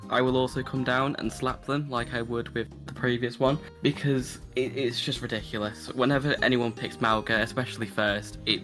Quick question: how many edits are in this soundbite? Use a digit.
0